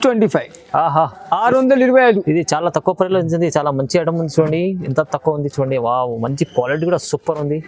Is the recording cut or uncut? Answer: uncut